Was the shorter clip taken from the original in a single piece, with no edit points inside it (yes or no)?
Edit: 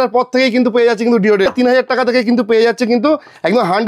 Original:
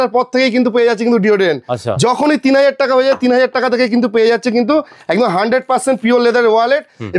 no